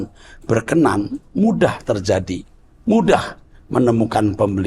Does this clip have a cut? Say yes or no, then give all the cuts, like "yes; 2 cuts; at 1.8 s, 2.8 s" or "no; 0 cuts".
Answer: no; 0 cuts